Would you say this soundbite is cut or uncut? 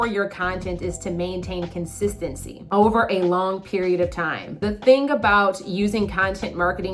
cut